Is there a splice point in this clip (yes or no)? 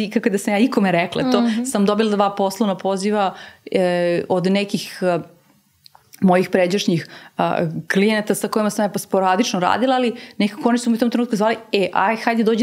no